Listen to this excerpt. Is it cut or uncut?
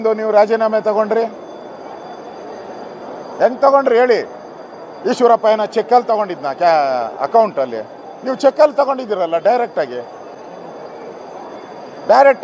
uncut